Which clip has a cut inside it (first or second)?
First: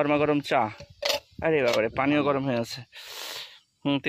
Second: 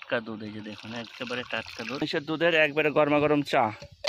second